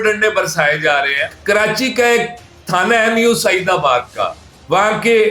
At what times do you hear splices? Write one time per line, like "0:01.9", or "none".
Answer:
0:01.2